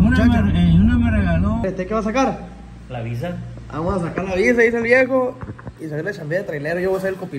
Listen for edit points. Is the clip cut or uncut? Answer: cut